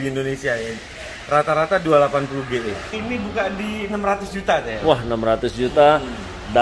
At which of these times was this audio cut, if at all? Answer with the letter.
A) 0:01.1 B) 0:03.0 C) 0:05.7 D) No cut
B